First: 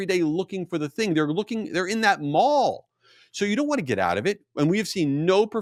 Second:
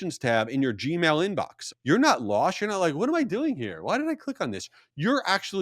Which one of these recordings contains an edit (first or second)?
second